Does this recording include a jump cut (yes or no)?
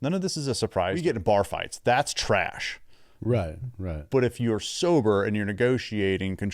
yes